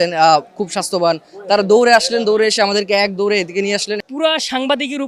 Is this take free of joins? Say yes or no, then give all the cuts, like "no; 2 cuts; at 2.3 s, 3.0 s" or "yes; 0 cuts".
no; 1 cut; at 4.0 s